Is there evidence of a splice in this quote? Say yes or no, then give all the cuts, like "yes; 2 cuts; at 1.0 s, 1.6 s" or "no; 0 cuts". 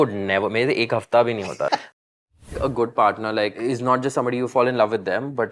yes; 3 cuts; at 1.9 s, 3.6 s, 4.5 s